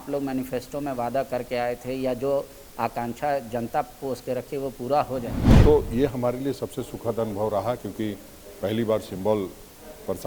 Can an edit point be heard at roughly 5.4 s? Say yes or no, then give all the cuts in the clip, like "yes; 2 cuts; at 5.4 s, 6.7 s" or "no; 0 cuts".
yes; 1 cut; at 5.4 s